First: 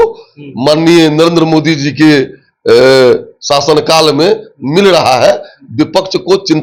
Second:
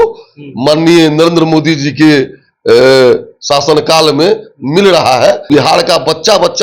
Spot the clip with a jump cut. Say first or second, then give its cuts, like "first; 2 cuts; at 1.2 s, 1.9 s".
second; 1 cut; at 5.5 s